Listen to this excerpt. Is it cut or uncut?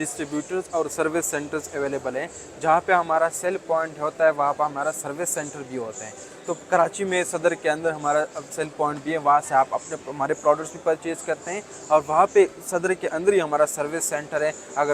uncut